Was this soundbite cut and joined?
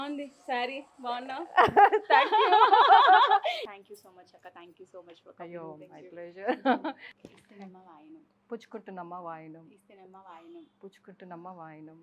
yes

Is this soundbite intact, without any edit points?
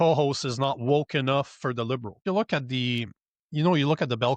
no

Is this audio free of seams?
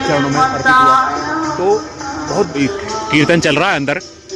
no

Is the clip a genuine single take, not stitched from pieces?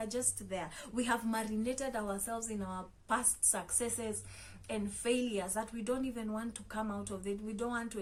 yes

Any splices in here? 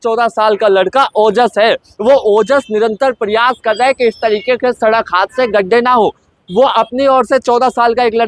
no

